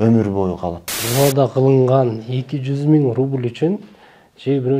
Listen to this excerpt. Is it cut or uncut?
cut